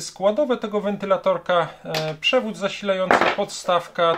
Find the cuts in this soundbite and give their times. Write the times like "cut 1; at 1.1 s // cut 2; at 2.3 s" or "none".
none